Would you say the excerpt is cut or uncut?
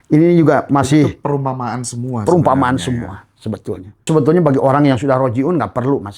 cut